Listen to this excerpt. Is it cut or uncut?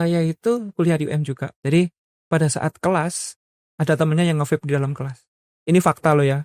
cut